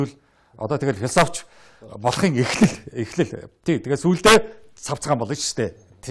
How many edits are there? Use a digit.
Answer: 0